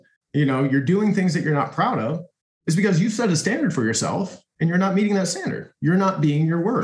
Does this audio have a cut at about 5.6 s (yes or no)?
yes